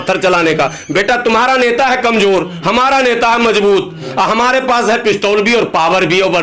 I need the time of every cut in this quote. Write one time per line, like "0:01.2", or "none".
none